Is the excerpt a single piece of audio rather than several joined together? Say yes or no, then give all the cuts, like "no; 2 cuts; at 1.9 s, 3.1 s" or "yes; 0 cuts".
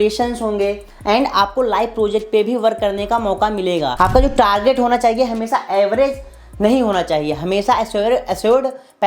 no; 1 cut; at 3.9 s